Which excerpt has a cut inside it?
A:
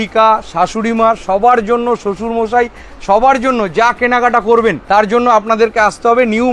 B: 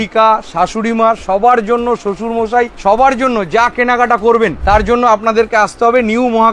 B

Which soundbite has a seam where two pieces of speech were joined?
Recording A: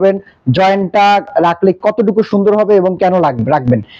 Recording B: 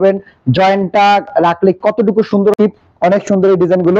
B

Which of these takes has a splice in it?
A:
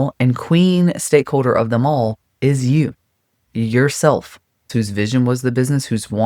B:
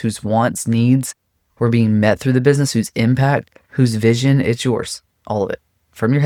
A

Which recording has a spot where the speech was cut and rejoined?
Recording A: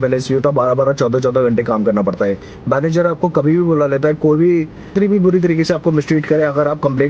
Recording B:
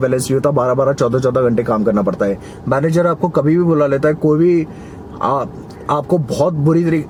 A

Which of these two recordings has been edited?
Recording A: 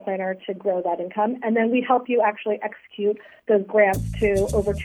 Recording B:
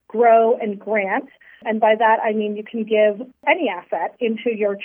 B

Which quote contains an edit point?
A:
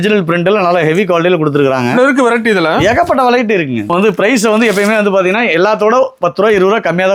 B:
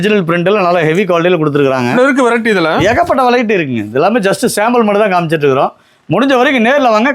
A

